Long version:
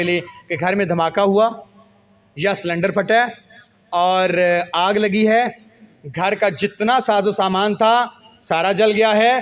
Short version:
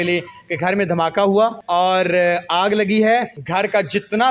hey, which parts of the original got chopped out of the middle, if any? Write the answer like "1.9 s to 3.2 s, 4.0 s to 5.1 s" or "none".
1.6 s to 3.8 s, 5.6 s to 6.1 s